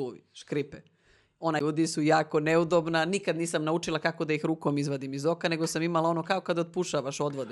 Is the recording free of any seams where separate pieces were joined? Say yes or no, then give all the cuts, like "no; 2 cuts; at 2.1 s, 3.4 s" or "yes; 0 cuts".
no; 1 cut; at 1.6 s